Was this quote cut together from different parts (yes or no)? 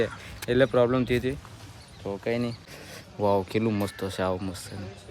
yes